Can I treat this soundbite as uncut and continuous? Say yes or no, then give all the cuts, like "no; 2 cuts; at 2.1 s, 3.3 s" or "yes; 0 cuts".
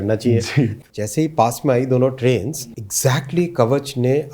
no; 2 cuts; at 0.8 s, 2.5 s